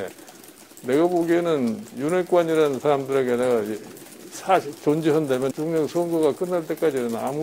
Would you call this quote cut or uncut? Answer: cut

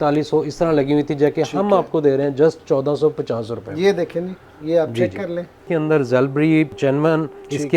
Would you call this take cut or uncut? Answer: cut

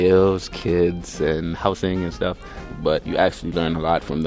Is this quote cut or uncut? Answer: cut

